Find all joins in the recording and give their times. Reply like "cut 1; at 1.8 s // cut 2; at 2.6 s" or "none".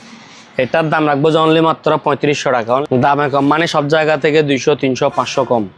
cut 1; at 2.8 s